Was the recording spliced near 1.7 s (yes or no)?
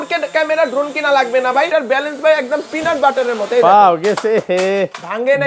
yes